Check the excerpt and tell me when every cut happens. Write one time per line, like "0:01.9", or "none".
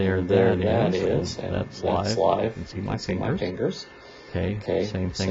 none